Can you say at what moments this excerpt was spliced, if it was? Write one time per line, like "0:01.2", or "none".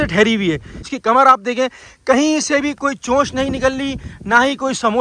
0:00.9